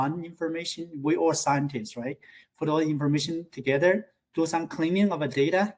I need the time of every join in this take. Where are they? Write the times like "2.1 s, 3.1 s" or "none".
none